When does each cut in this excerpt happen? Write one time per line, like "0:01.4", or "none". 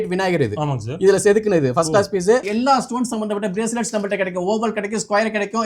0:02.5